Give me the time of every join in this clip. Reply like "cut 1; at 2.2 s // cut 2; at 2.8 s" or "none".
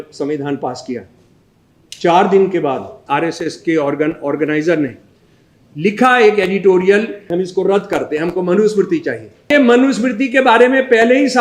cut 1; at 3.0 s // cut 2; at 7.2 s // cut 3; at 9.5 s